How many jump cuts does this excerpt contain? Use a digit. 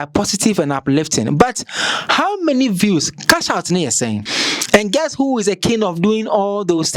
1